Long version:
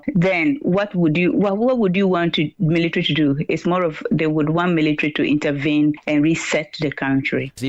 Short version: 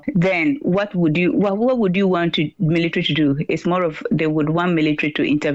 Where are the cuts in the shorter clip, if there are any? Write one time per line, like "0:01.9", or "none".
none